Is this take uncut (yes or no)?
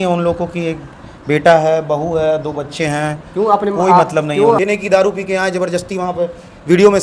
no